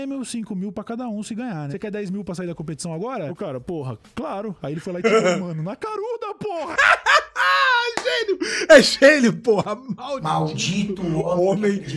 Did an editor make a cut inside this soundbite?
yes; 1 cut; at 6.8 s

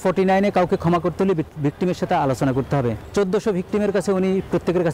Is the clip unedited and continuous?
no; 1 cut; at 3.0 s

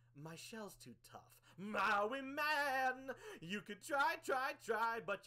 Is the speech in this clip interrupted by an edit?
no; 0 cuts

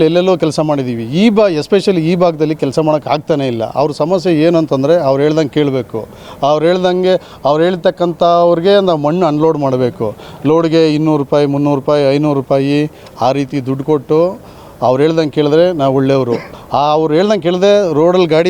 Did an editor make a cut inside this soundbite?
no; 0 cuts

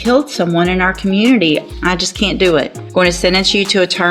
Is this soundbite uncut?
no; 2 cuts; at 1.7 s, 2.8 s

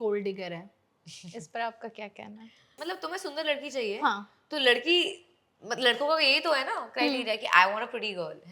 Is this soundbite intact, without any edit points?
no; 1 cut; at 2.8 s

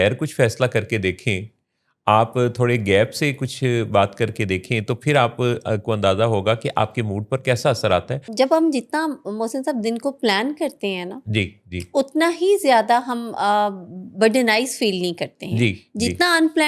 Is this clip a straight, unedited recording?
no; 1 cut; at 8.3 s

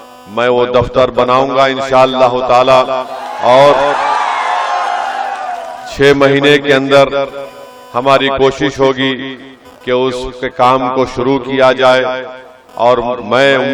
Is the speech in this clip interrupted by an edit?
no; 0 cuts

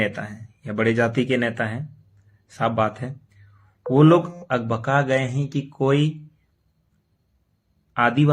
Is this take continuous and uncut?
yes; 0 cuts

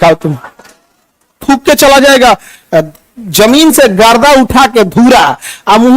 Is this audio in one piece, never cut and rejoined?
no; 1 cut; at 1.4 s

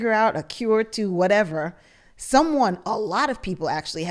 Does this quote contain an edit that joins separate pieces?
no; 0 cuts

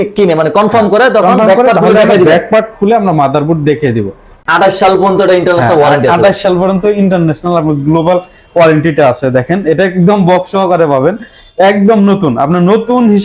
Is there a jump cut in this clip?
yes; 1 cut; at 4.4 s

